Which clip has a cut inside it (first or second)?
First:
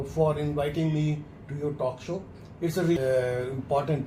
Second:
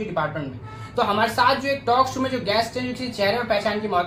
first